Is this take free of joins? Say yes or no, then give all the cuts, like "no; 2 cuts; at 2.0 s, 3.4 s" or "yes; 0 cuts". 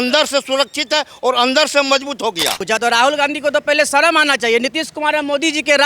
no; 1 cut; at 2.6 s